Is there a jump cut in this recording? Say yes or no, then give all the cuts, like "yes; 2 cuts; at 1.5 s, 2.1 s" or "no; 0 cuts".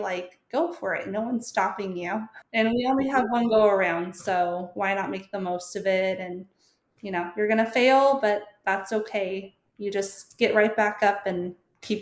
yes; 1 cut; at 2.4 s